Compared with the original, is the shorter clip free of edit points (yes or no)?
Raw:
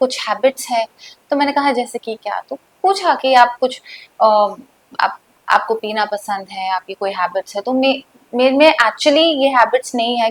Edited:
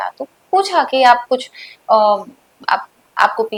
yes